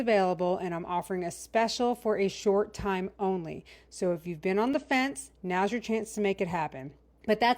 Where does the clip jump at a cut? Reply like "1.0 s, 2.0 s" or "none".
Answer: none